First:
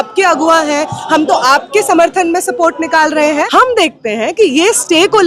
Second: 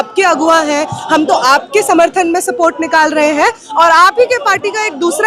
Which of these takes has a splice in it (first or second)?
first